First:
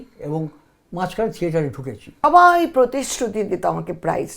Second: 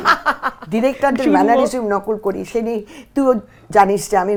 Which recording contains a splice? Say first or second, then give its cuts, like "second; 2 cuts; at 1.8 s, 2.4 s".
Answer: first; 1 cut; at 2.1 s